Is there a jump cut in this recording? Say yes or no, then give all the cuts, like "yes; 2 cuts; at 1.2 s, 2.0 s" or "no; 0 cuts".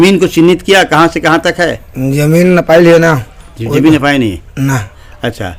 no; 0 cuts